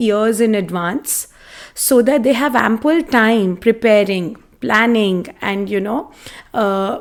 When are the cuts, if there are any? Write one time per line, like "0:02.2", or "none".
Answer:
none